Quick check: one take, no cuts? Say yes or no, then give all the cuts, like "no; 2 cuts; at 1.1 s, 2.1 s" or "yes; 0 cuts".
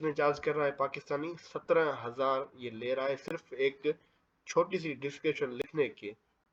yes; 0 cuts